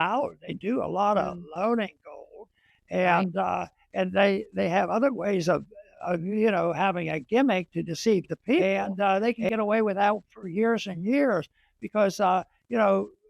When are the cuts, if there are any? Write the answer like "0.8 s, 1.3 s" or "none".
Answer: 8.6 s